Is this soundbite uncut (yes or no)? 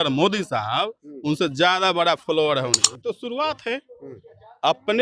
no